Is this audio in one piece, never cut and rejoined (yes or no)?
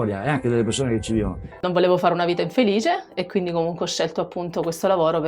no